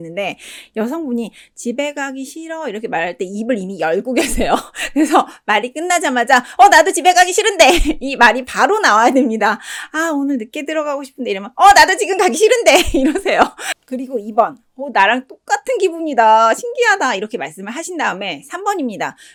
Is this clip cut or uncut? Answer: uncut